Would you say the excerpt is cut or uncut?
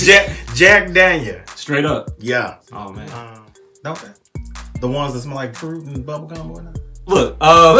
cut